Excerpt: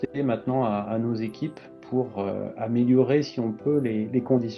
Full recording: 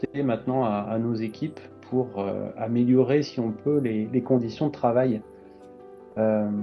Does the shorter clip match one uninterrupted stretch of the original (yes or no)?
yes